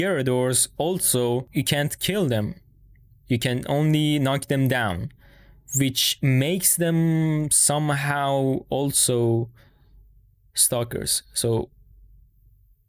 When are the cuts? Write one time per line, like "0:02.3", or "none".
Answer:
0:01.5